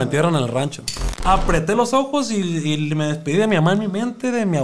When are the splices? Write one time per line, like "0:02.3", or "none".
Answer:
0:01.1